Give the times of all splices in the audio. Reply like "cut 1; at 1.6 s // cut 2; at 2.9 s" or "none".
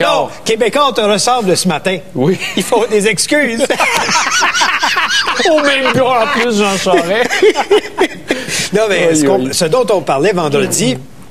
cut 1; at 5.8 s